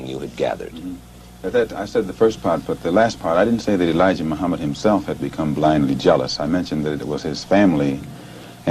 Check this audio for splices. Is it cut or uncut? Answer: uncut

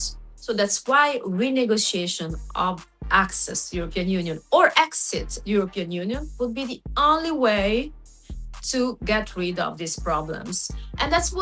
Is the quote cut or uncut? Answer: uncut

